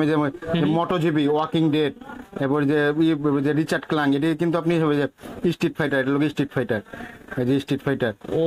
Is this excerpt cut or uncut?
uncut